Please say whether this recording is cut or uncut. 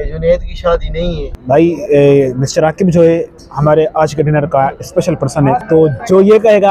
cut